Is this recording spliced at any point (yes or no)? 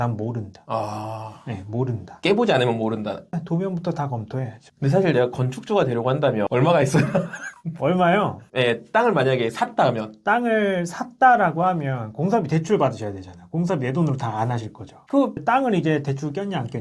yes